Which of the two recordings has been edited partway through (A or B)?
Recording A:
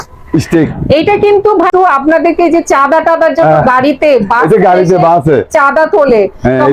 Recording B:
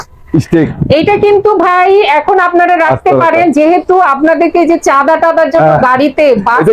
A